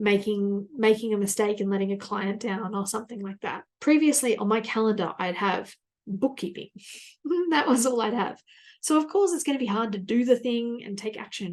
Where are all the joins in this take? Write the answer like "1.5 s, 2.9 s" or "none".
3.6 s